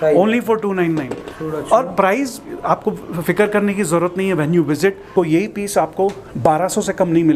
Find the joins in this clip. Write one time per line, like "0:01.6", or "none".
0:05.1